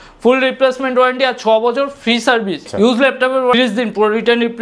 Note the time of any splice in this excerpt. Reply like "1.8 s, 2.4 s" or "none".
2.6 s, 3.5 s